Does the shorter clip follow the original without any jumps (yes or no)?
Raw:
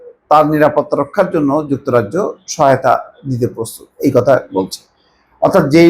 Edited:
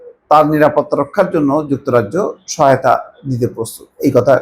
yes